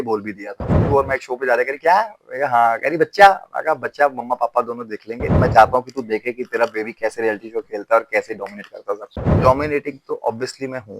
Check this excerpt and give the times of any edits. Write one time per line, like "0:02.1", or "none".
0:00.7
0:05.4
0:09.2

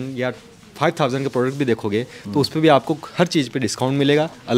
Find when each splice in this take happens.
none

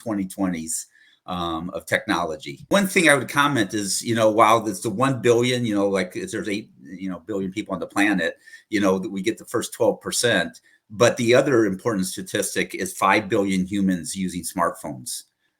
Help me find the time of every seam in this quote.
0:02.7

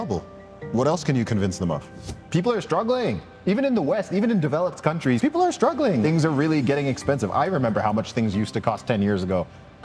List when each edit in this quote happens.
0:02.3
0:05.2
0:06.0

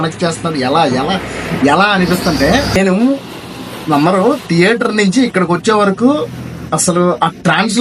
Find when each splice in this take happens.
0:02.8

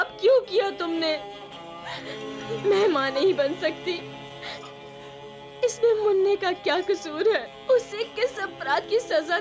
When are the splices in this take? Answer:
0:02.3
0:07.5

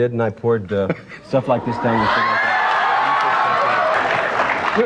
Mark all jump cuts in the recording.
0:03.9

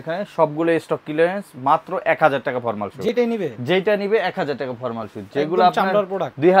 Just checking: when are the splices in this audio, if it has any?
none

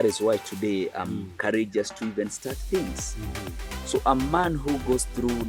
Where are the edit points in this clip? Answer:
none

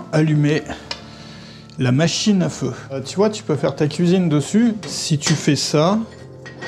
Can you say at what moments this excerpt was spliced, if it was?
0:03.0
0:04.8

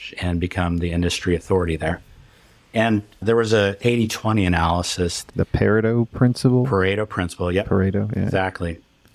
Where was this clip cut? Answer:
0:05.2

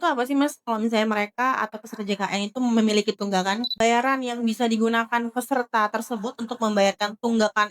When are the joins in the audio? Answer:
0:03.8

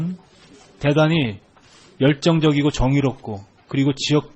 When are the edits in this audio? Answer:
0:02.6

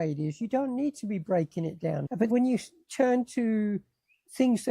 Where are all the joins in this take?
0:02.3

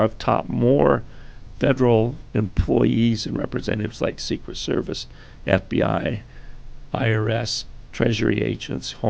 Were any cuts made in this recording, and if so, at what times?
none

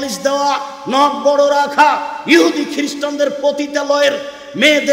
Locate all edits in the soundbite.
none

